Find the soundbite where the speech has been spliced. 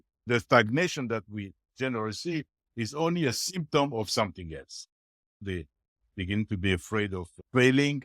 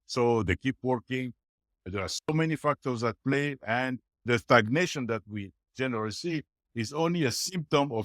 first; 1 cut; at 5.4 s

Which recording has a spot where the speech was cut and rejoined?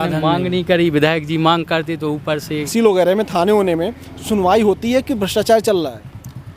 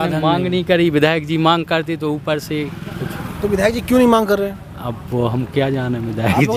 first; 1 cut; at 2.7 s

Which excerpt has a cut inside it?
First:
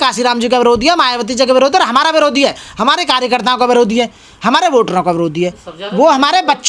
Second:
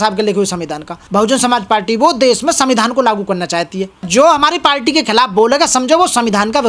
second; 2 cuts; at 1.0 s, 4.1 s

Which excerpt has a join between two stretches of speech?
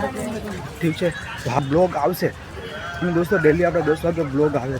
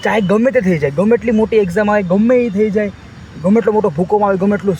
first; 1 cut; at 1.6 s

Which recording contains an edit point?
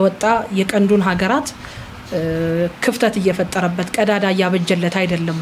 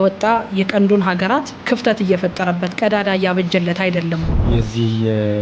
second; 2 cuts; at 1.6 s, 4.3 s

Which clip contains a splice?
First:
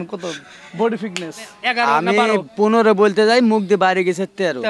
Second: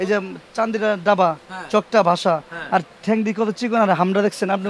first; 1 cut; at 1.5 s

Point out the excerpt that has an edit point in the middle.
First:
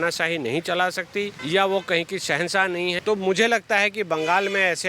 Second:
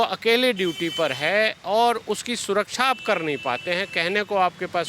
first; 2 cuts; at 1.4 s, 3.0 s

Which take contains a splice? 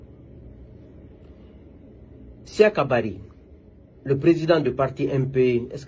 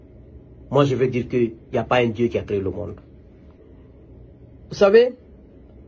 second; 1 cut; at 3.6 s

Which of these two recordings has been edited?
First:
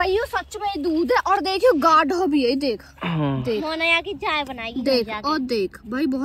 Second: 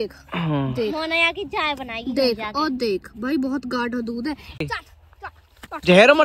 second; 1 cut; at 4.6 s

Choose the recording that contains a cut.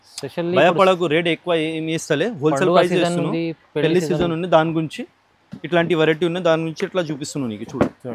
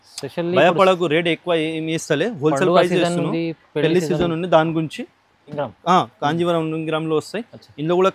second; 1 cut; at 5.6 s

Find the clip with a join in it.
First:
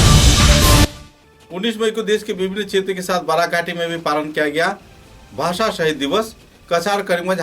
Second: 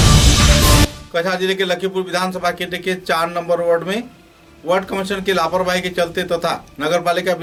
first; 1 cut; at 1.0 s

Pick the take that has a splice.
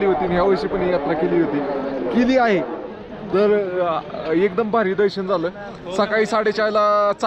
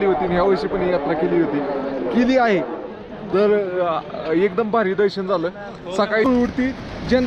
second; 1 cut; at 6.3 s

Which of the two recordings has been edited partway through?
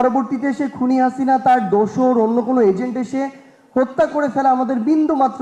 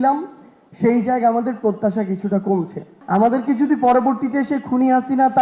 second; 1 cut; at 2.9 s

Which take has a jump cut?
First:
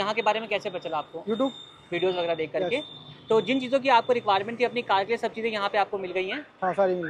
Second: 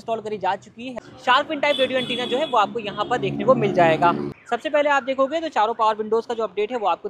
second; 2 cuts; at 1.0 s, 4.3 s

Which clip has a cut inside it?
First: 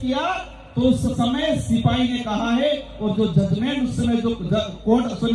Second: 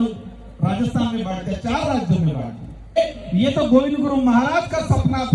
second; 1 cut; at 3.0 s

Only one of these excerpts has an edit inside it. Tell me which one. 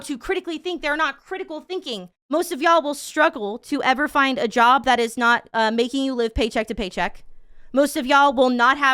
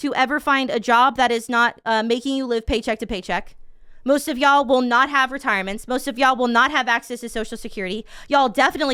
first; 1 cut; at 2.1 s

